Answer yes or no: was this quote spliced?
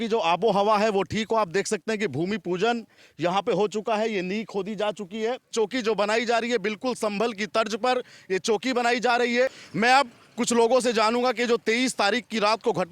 yes